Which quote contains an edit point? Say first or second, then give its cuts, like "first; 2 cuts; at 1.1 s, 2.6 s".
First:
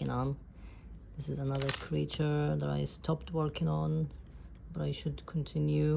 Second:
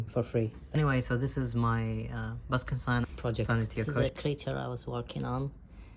second; 2 cuts; at 0.8 s, 3.9 s